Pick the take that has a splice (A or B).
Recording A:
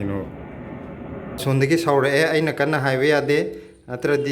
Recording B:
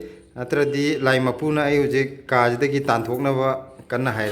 A